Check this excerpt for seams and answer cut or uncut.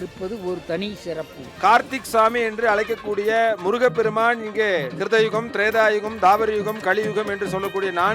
cut